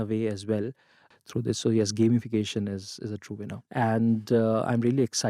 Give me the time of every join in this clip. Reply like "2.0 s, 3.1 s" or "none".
1.0 s, 3.6 s